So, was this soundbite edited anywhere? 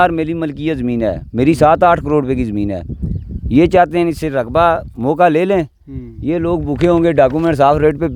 no; 0 cuts

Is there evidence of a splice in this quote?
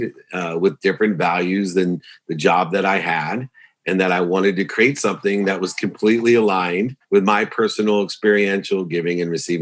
yes; 1 cut; at 7.0 s

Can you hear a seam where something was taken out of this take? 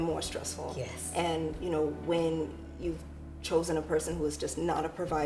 no; 0 cuts

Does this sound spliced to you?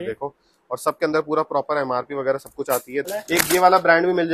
yes; 1 cut; at 3.1 s

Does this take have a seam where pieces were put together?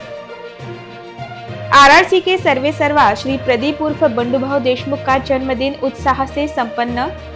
no; 0 cuts

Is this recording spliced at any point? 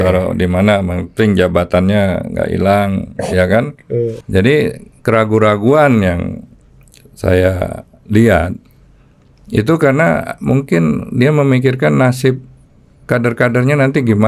yes; 1 cut; at 4.2 s

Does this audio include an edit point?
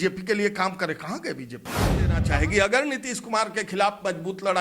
yes; 1 cut; at 2.1 s

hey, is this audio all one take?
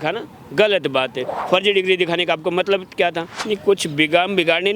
no; 2 cuts; at 1.3 s, 3.3 s

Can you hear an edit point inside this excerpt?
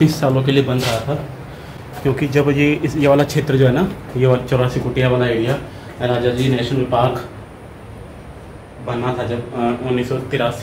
no; 0 cuts

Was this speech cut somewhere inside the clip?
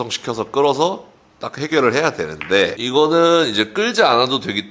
yes; 1 cut; at 2.8 s

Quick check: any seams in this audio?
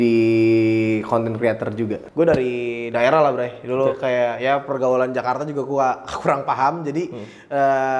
yes; 1 cut; at 2.0 s

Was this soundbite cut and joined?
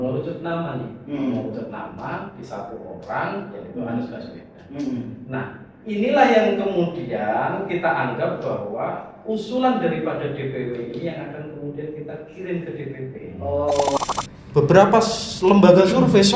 yes; 1 cut; at 14.0 s

